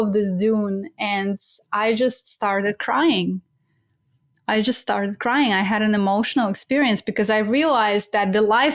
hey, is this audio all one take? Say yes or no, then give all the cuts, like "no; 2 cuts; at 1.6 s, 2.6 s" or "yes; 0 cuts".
yes; 0 cuts